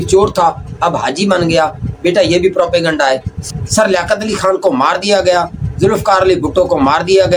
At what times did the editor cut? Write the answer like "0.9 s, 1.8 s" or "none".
3.3 s